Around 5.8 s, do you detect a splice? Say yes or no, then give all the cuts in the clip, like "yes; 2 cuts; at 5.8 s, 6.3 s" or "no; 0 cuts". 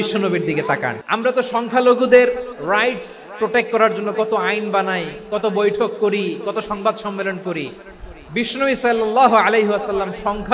no; 1 cut; at 1.0 s